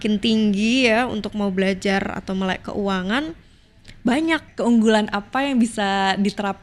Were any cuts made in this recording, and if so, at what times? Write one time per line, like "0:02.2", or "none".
0:04.5